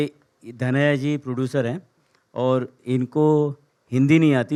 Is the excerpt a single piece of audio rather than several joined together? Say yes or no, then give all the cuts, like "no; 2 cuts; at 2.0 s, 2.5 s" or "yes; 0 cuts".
yes; 0 cuts